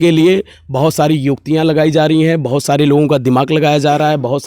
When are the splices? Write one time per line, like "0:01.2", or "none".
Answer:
none